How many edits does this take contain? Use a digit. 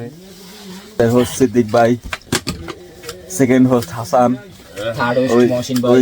1